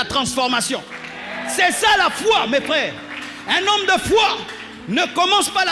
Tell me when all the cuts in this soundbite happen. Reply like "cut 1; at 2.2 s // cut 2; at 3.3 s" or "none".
none